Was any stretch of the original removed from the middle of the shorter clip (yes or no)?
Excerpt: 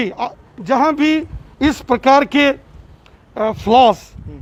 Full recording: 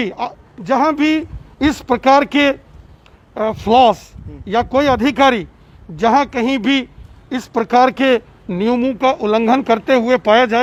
no